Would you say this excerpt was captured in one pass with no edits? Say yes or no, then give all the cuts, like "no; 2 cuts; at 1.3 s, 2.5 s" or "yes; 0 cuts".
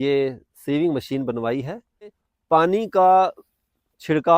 no; 1 cut; at 2.2 s